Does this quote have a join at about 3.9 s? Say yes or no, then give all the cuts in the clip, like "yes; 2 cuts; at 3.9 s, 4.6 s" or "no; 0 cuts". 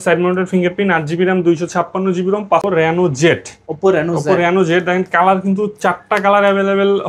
no; 1 cut; at 2.7 s